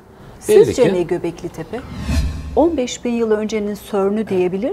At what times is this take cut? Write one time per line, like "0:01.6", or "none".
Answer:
0:02.4